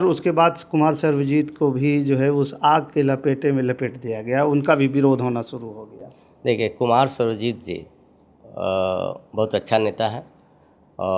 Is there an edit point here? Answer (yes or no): no